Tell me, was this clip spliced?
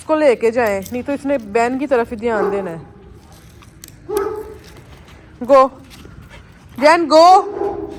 no; 0 cuts

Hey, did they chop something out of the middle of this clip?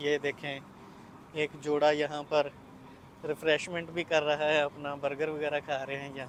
no; 0 cuts

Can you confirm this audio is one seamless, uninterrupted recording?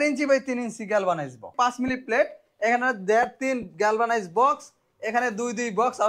no; 1 cut; at 1.5 s

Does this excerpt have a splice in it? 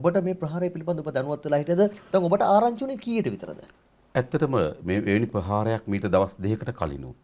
no; 0 cuts

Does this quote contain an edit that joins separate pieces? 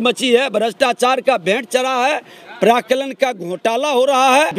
no; 0 cuts

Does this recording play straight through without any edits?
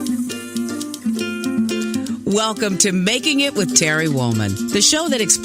yes; 0 cuts

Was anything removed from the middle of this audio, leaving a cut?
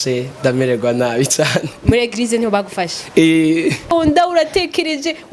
yes; 1 cut; at 3.9 s

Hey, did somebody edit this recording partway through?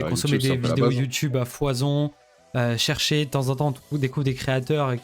no; 0 cuts

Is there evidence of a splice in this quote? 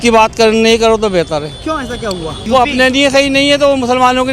yes; 1 cut; at 2.3 s

